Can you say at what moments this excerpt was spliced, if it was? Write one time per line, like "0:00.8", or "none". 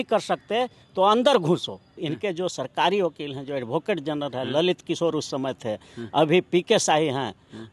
0:02.1